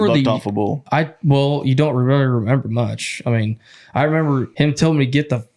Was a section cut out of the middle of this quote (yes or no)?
yes